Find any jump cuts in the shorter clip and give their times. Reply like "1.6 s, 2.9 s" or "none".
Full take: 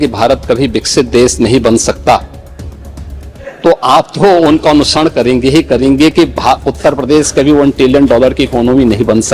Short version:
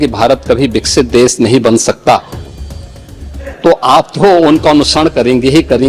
none